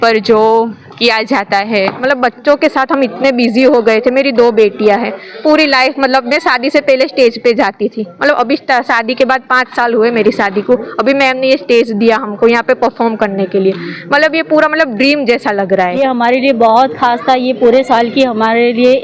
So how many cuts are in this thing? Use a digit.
2